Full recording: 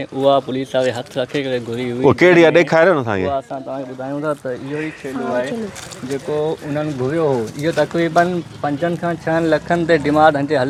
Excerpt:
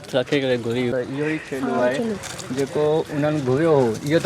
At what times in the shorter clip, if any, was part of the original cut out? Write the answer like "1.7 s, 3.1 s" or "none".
0.9 s

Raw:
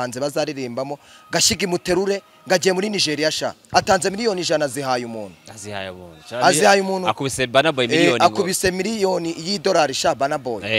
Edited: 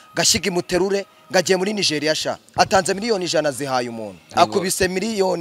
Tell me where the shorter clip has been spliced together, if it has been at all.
4.3 s

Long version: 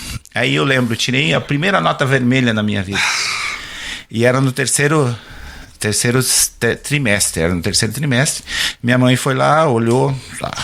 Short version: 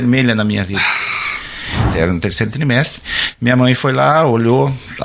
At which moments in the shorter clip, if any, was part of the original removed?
1.9 s

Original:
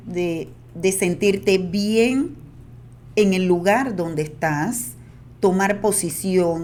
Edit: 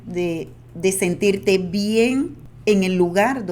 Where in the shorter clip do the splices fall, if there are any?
2.4 s

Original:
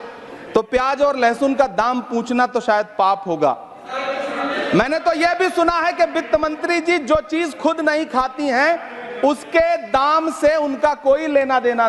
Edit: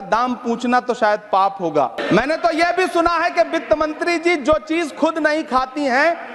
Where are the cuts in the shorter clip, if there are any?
2.0 s

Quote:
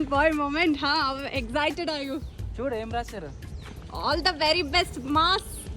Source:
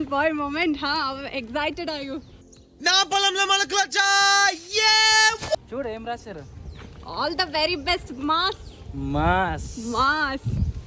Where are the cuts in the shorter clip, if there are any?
2.5 s

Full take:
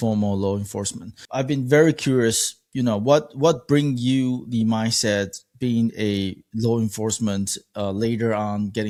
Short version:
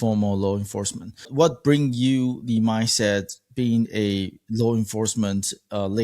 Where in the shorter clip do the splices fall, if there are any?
1.3 s

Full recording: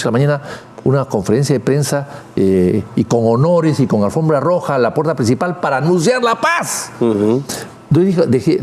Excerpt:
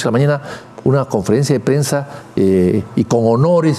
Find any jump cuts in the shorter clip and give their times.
none

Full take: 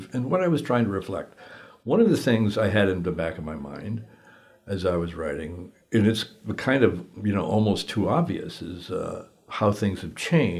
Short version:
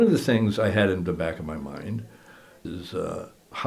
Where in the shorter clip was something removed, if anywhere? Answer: 2.6 s

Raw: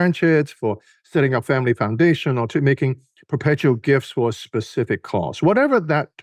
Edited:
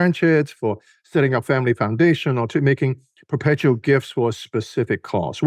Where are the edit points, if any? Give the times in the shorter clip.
none

